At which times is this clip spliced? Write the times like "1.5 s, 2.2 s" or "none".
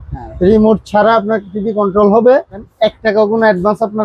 2.7 s